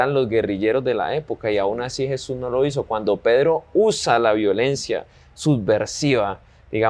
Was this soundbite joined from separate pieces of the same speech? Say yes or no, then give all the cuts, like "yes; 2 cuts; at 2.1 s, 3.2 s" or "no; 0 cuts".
no; 0 cuts